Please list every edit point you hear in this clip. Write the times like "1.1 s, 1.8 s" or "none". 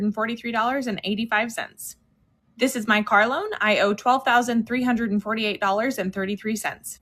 none